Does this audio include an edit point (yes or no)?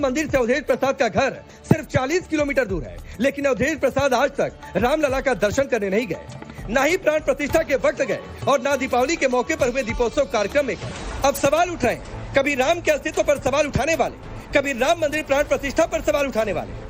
yes